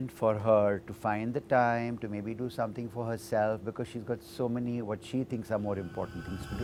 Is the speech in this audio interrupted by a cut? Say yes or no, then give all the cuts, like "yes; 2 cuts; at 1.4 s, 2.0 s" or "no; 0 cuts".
no; 0 cuts